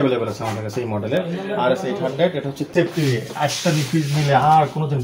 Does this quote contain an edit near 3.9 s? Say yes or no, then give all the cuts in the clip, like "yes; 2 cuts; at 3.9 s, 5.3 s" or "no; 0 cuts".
no; 1 cut; at 2.7 s